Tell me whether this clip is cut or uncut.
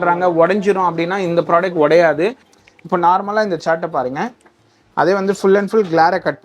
cut